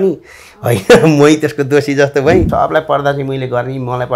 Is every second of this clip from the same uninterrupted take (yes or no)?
no